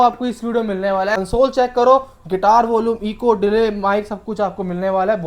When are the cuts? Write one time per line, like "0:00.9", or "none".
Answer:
0:01.2